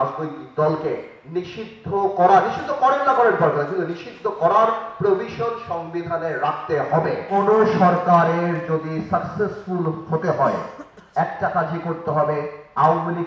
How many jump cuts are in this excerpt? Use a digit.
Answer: 1